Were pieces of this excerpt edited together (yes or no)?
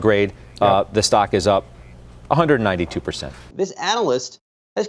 yes